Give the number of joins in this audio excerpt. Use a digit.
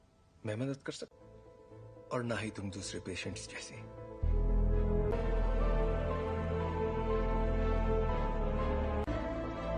1